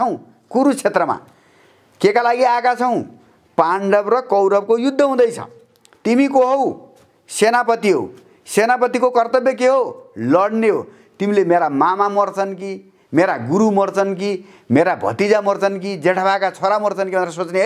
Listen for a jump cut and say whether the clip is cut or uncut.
uncut